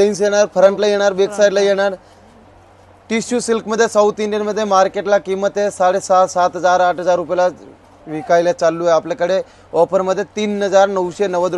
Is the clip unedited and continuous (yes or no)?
yes